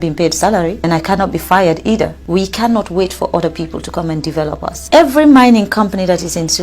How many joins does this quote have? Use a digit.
3